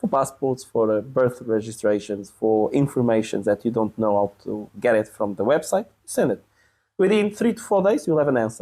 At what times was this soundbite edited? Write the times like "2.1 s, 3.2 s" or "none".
none